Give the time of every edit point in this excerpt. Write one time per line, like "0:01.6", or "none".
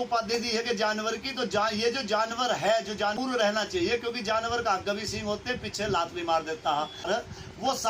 0:03.2
0:07.1

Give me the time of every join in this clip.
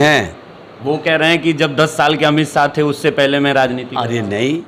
none

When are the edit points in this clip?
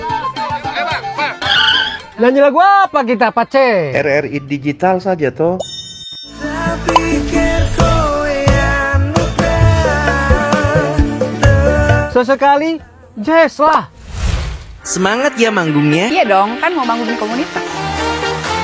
0:01.1

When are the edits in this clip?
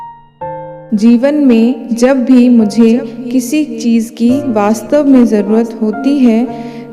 0:00.9

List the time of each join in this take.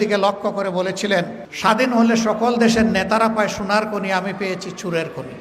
0:01.4

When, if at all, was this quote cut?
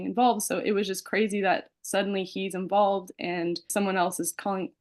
0:03.7

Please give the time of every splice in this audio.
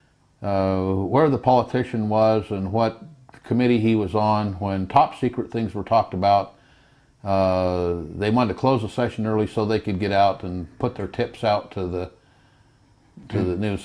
none

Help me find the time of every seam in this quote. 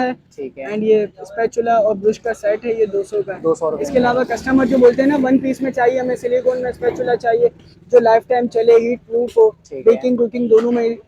none

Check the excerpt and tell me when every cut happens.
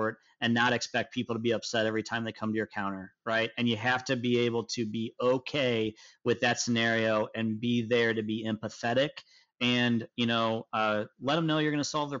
none

